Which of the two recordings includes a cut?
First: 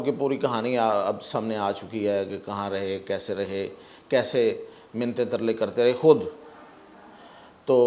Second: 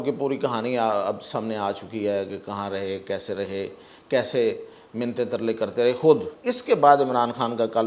second; 1 cut; at 6.3 s

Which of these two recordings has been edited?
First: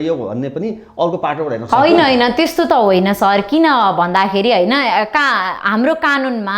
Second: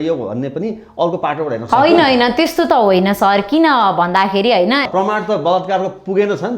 second; 1 cut; at 4.9 s

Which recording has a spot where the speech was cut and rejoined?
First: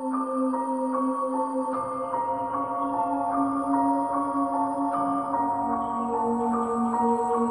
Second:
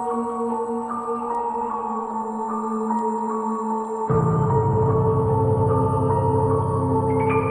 first; 1 cut; at 1.0 s

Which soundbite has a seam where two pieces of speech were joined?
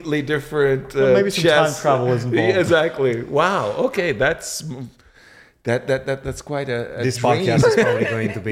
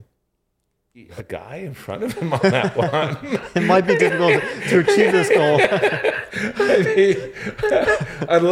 second; 1 cut; at 1.1 s

